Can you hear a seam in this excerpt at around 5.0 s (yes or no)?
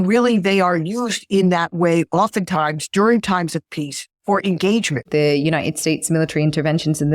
yes